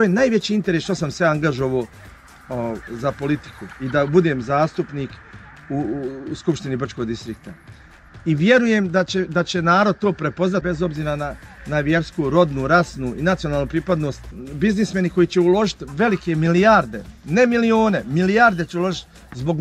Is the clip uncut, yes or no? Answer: no